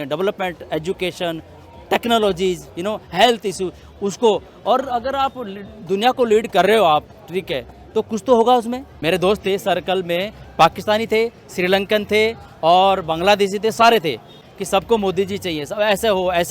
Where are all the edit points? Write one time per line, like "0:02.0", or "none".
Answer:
0:08.8
0:14.4

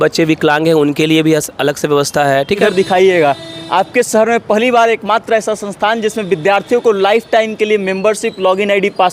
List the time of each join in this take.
0:02.6

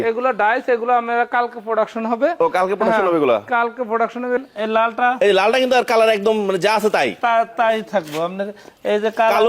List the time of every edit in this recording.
0:04.4

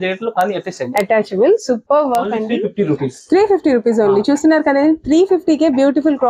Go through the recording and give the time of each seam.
0:02.4

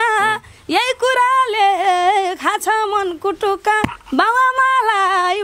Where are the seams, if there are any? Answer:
none

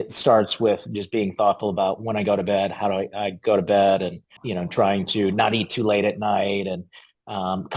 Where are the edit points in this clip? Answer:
0:04.4

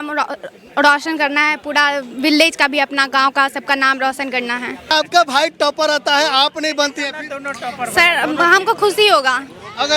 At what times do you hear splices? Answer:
0:04.9

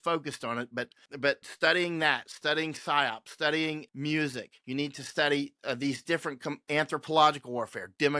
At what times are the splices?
0:01.3
0:04.0

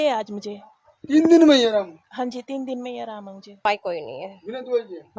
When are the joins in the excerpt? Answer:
0:03.7

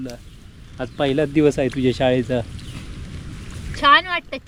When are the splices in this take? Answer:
none

